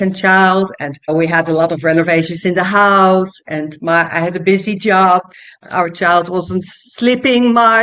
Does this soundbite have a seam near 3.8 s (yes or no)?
no